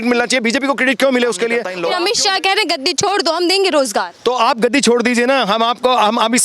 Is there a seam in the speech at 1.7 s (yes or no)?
yes